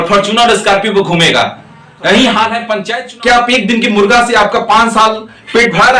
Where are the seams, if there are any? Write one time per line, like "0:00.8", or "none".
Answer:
0:02.9